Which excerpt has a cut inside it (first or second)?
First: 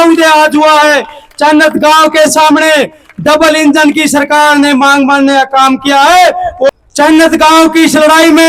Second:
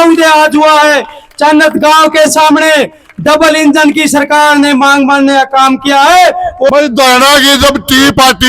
second